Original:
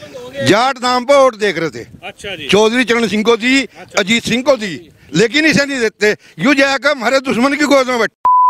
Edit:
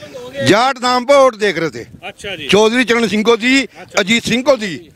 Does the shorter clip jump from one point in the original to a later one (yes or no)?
no